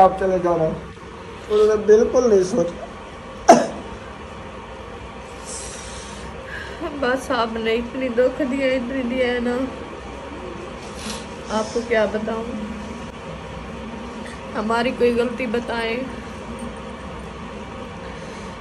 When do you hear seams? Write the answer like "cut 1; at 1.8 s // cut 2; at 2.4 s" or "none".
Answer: none